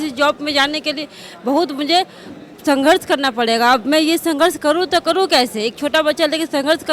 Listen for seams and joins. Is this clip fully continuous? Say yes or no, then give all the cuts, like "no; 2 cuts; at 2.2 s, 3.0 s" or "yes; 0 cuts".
yes; 0 cuts